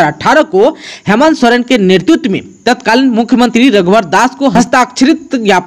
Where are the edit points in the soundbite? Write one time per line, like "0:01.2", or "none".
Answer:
0:04.5